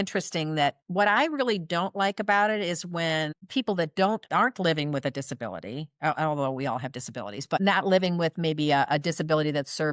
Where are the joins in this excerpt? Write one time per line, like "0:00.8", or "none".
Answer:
0:00.8
0:03.4
0:04.3
0:07.6

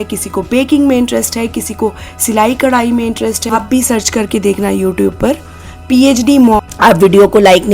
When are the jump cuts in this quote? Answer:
0:03.4
0:06.6

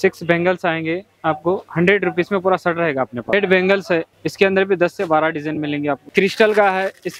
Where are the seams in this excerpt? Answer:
0:03.3
0:04.1
0:06.0

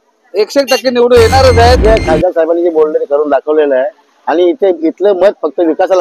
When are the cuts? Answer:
0:01.8

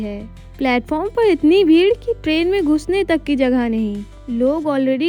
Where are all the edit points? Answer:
none

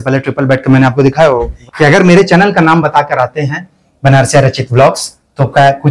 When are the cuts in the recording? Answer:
0:01.5

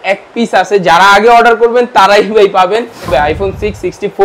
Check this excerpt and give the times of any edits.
0:03.1

